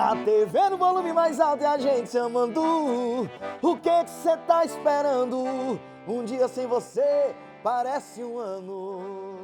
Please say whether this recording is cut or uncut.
uncut